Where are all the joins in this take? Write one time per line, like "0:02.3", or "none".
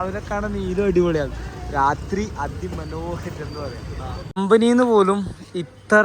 0:04.4